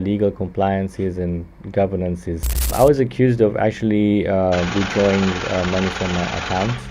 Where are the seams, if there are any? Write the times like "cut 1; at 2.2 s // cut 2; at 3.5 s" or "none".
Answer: cut 1; at 2.7 s